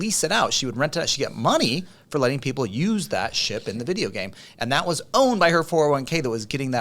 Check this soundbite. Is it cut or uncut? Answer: uncut